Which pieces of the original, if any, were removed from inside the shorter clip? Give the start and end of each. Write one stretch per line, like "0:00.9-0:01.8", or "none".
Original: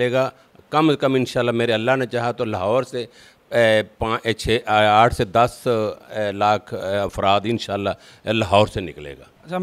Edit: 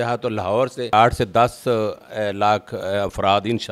0:03.1-0:04.9